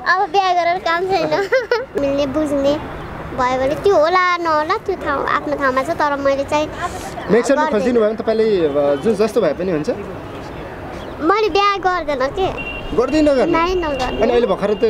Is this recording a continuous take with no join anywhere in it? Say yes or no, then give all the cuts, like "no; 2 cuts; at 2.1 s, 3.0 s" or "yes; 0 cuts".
no; 1 cut; at 2.0 s